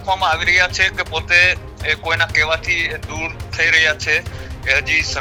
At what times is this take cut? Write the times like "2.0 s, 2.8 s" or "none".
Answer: none